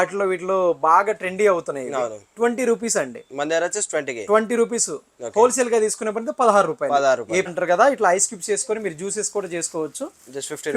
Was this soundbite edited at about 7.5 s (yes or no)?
yes